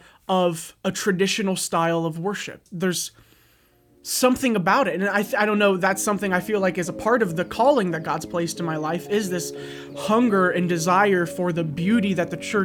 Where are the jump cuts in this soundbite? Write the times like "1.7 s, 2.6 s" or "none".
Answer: none